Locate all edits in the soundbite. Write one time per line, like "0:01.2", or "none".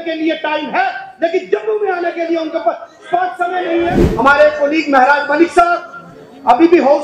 0:04.0